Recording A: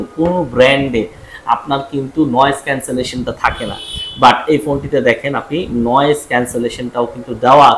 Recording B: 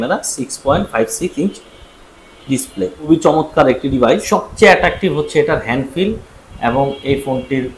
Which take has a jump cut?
B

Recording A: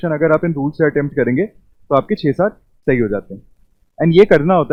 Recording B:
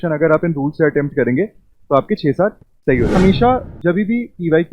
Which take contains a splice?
B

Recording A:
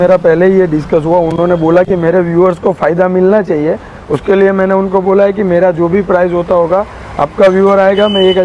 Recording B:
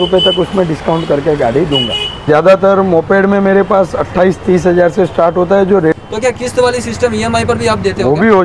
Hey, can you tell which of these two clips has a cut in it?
B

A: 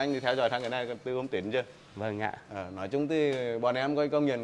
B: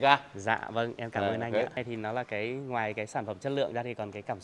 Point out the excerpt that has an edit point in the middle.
B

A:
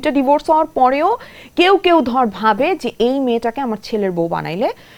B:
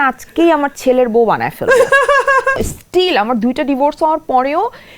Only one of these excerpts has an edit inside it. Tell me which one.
B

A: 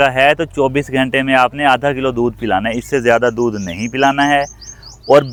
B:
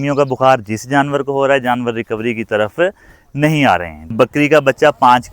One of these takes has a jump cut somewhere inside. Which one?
B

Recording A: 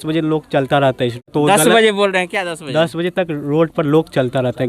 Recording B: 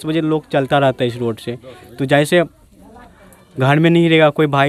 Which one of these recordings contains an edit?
A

